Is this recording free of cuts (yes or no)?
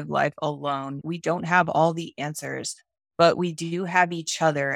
no